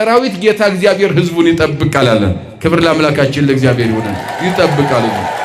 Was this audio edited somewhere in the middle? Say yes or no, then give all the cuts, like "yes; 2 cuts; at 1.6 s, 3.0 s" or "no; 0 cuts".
no; 0 cuts